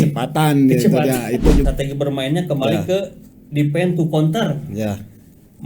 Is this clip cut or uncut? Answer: cut